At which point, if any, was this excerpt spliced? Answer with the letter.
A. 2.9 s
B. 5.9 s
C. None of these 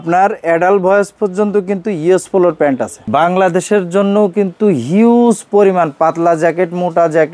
A